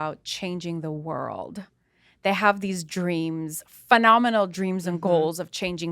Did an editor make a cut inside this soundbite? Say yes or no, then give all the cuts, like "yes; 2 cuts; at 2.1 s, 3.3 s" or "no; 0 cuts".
no; 0 cuts